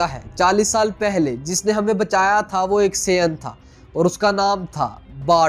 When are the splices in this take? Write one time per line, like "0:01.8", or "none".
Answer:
none